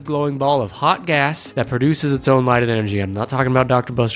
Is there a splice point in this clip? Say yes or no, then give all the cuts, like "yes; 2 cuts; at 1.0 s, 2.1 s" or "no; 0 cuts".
yes; 1 cut; at 1.4 s